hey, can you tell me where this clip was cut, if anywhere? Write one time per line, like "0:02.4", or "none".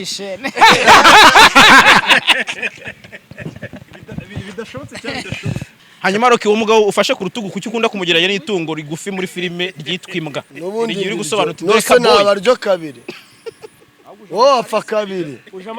0:05.7